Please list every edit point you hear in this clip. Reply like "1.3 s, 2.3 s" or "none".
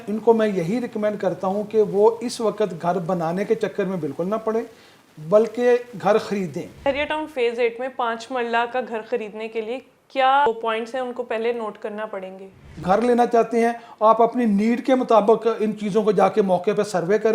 6.9 s, 10.5 s, 12.8 s

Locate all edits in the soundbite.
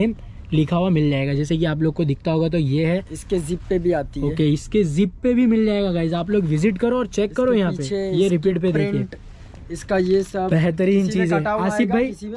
none

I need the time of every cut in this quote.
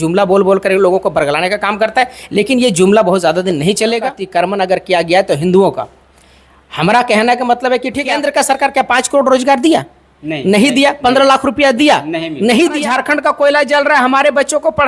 4.2 s, 8.1 s, 12.9 s

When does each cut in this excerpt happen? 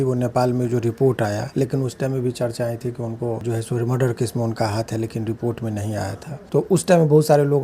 3.4 s, 6.3 s

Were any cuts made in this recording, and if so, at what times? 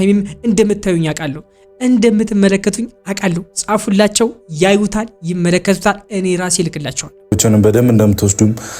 7.1 s

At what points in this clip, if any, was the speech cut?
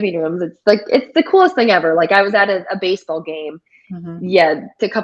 none

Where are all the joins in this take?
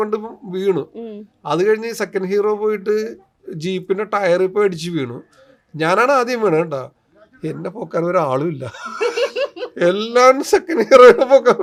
none

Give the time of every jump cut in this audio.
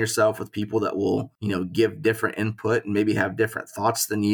1.3 s

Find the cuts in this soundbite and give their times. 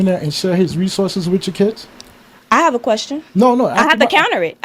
3.3 s

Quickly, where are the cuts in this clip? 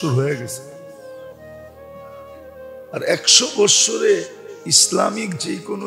0.7 s, 2.8 s

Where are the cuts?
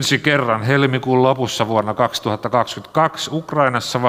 none

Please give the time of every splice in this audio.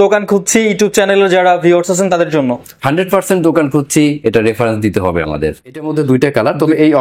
5.9 s

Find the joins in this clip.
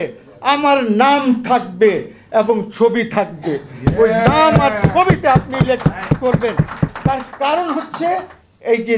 none

